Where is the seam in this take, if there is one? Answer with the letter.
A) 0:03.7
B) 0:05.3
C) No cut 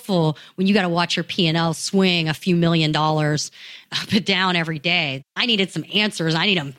B